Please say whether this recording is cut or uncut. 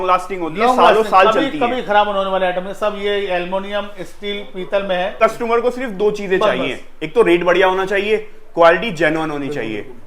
cut